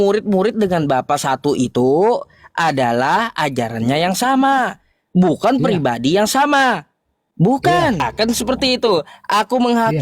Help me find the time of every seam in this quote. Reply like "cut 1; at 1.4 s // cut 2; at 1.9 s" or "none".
cut 1; at 8.0 s